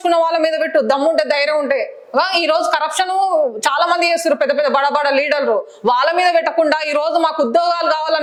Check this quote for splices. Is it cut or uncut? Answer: uncut